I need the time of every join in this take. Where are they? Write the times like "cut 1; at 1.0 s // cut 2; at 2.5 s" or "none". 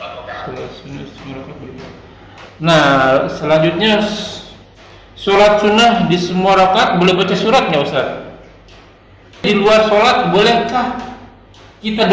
cut 1; at 9.4 s